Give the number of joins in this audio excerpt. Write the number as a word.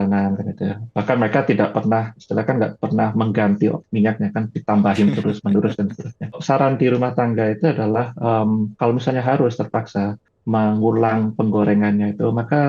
two